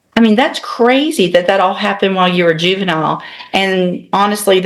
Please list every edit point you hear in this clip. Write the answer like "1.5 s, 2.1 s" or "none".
none